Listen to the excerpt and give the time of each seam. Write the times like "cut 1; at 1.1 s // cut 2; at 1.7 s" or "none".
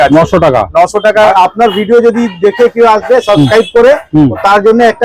cut 1; at 1.3 s